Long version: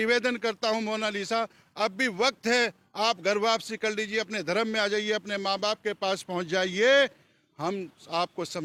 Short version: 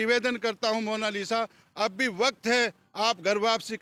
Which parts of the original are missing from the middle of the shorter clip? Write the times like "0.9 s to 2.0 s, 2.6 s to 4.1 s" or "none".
none